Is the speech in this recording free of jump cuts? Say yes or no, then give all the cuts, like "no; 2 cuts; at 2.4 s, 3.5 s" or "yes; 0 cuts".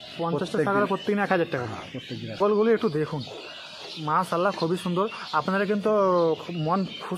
no; 1 cut; at 2.4 s